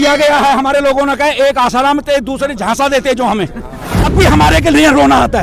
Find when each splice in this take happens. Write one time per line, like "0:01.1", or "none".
0:04.0